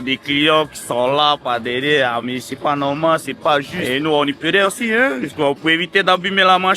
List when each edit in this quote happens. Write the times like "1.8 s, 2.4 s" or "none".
3.8 s